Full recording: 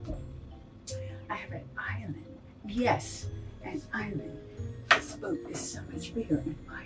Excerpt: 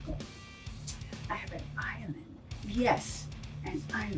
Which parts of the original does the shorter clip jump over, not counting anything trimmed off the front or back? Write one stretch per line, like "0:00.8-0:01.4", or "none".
none